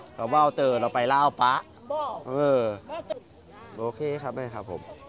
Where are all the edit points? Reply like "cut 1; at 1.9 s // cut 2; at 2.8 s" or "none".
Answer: cut 1; at 3.1 s